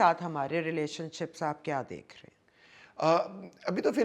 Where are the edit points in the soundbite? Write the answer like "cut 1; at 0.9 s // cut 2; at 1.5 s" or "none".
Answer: none